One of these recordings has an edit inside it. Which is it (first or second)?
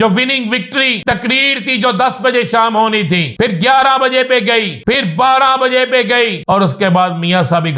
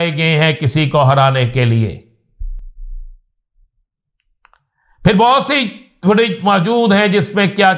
first